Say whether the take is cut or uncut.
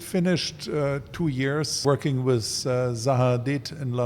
cut